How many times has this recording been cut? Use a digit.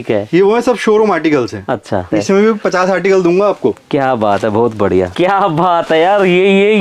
2